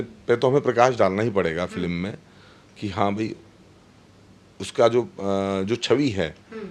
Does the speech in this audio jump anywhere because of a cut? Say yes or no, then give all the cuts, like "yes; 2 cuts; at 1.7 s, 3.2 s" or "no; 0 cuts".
no; 0 cuts